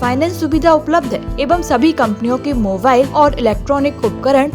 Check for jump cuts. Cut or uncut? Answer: cut